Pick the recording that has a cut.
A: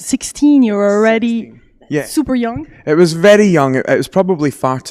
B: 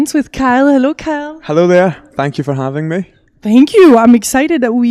A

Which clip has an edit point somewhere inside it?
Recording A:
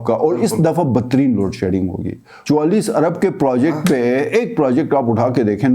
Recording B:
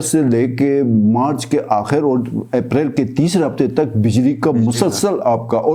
A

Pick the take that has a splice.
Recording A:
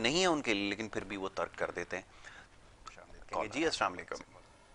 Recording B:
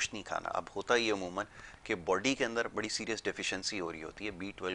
A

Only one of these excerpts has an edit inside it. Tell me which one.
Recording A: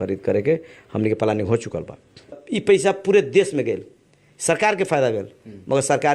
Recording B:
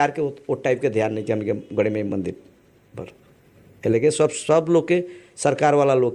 A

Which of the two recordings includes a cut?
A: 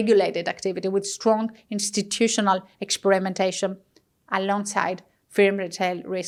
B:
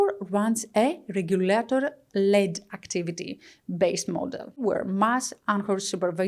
B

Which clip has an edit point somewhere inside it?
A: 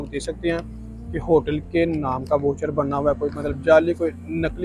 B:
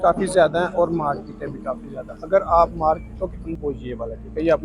B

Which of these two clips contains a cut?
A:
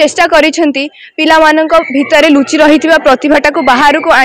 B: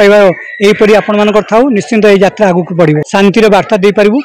B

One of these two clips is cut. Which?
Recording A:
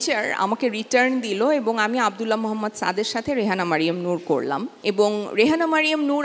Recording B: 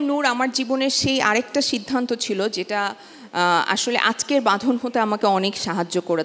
A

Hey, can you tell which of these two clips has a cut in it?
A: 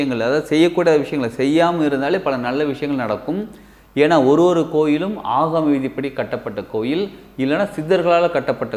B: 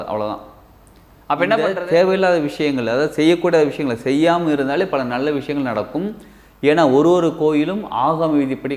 B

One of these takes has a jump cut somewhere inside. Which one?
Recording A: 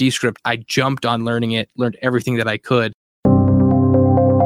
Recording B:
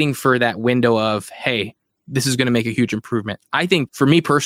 A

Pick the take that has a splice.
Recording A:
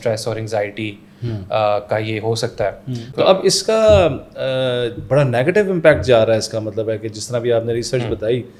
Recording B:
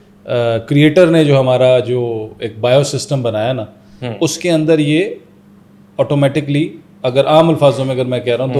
A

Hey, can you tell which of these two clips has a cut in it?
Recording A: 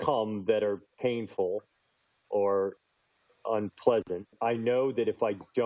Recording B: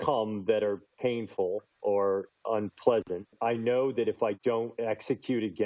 B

